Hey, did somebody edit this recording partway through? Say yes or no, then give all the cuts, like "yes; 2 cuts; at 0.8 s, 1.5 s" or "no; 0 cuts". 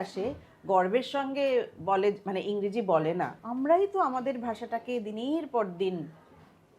yes; 1 cut; at 3.4 s